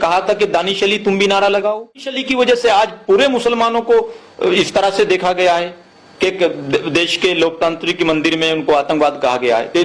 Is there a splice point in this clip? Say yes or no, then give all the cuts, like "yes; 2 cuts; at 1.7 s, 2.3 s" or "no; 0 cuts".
yes; 1 cut; at 2.2 s